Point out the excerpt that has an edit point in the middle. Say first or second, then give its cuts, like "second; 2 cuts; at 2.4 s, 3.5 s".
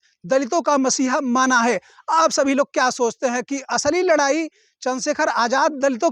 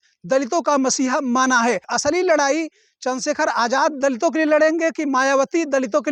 second; 1 cut; at 1.9 s